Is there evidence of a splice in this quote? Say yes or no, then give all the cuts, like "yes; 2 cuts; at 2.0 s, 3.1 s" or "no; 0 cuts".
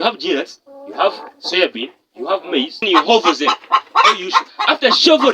yes; 1 cut; at 2.8 s